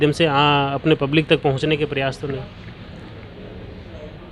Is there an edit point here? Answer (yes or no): no